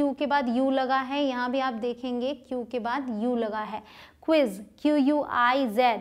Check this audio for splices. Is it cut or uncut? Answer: uncut